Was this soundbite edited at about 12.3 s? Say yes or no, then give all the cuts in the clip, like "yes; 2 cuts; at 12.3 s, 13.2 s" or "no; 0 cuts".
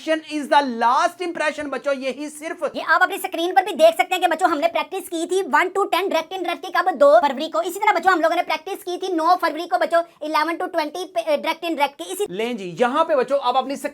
yes; 2 cuts; at 2.7 s, 12.3 s